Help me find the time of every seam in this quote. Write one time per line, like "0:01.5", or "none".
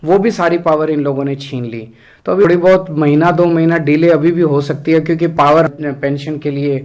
0:02.4
0:05.7